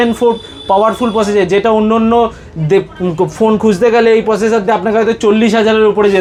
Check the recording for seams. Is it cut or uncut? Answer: uncut